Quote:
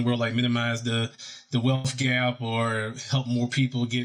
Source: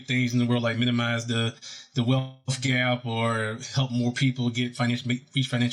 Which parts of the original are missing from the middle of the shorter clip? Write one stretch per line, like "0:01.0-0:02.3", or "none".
0:02.3-0:02.5